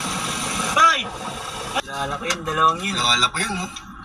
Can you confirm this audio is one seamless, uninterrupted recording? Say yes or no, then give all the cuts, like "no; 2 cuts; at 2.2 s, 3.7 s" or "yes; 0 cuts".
no; 1 cut; at 1.9 s